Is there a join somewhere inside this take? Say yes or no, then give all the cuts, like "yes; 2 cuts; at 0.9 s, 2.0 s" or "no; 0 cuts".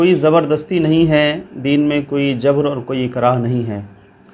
no; 0 cuts